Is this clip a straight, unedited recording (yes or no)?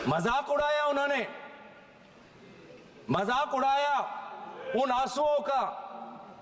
yes